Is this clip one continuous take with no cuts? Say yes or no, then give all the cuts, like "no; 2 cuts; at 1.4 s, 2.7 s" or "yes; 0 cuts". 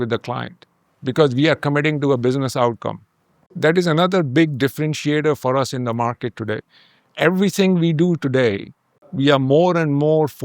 no; 2 cuts; at 3.4 s, 9.0 s